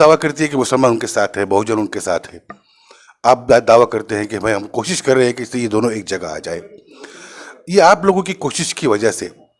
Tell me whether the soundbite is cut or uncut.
uncut